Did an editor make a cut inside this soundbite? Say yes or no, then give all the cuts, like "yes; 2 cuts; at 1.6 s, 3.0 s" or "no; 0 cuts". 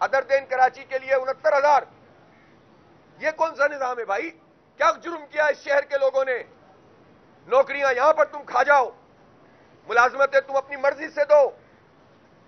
no; 0 cuts